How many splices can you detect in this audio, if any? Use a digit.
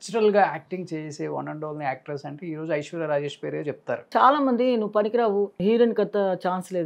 2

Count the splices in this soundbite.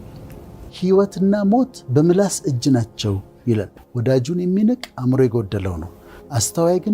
1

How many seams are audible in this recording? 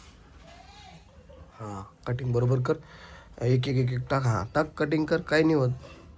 0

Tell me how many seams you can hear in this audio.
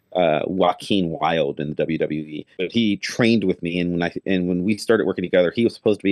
1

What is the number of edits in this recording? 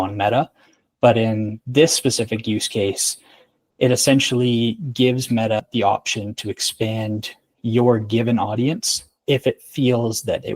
1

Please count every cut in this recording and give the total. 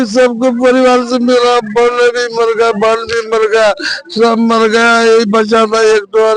0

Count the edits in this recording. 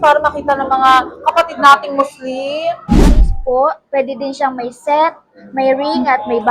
1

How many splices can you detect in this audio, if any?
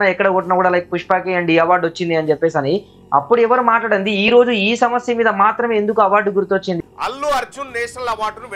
1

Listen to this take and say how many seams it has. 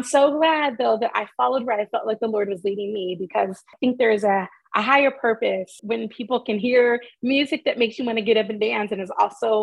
2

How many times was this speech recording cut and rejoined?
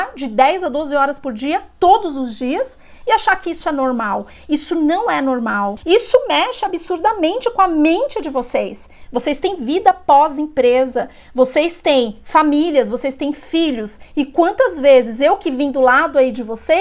1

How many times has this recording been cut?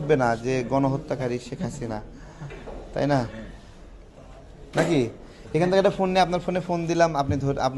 0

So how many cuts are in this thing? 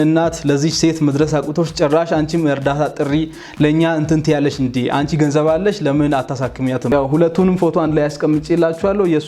1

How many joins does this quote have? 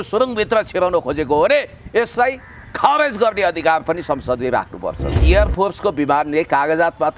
1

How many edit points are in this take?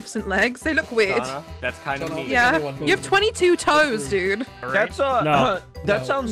2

